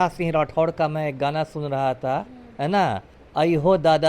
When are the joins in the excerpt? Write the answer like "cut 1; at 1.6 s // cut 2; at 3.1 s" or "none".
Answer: cut 1; at 3.1 s